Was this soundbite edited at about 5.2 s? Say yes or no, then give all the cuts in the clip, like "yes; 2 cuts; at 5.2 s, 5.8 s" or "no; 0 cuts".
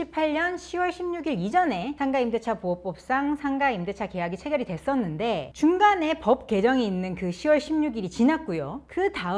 no; 0 cuts